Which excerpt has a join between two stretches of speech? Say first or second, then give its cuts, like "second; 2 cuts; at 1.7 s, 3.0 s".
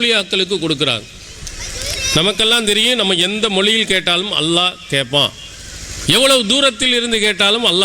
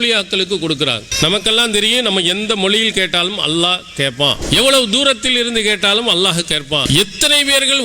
second; 3 cuts; at 1.1 s, 4.4 s, 6.8 s